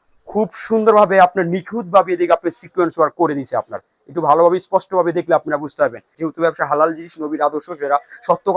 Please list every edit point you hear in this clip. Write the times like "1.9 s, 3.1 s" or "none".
6.1 s